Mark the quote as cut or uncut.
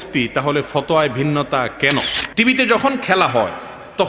cut